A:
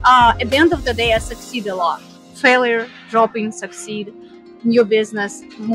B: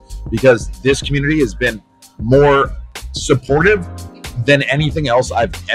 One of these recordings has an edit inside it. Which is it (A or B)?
A